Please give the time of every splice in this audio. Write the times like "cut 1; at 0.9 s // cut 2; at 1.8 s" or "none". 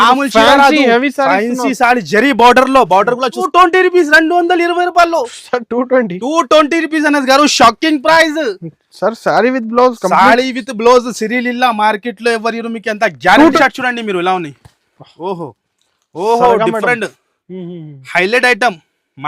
cut 1; at 3.4 s // cut 2; at 13.6 s